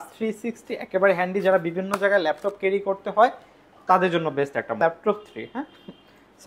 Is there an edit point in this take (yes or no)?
yes